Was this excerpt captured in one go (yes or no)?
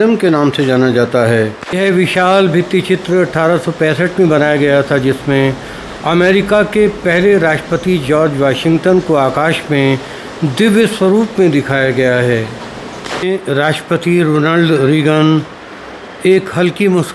no